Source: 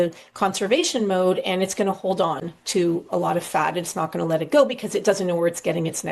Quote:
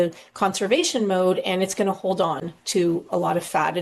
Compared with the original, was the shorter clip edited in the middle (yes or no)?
no